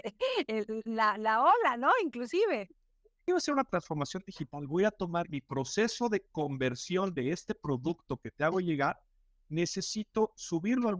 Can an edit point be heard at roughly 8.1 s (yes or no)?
no